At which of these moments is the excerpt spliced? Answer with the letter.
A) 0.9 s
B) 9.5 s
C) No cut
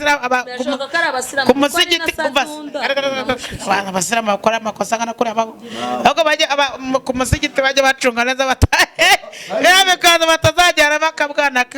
C